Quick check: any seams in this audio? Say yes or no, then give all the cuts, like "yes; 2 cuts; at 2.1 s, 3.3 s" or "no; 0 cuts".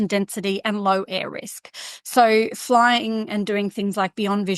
no; 0 cuts